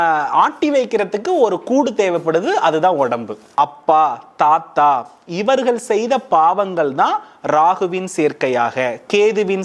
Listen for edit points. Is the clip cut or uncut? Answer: cut